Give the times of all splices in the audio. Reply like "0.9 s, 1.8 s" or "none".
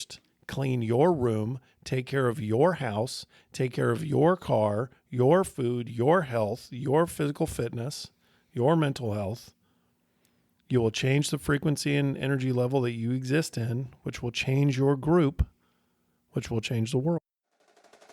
17.2 s